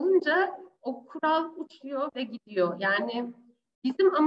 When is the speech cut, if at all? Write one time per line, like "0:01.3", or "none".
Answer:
none